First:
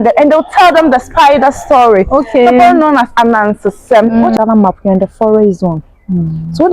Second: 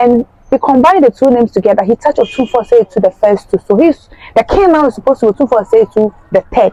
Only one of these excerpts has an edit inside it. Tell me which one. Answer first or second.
first